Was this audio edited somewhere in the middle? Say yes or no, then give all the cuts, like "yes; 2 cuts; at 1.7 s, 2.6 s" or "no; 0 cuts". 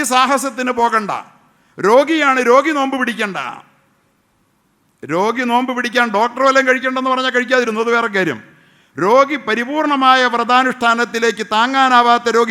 no; 0 cuts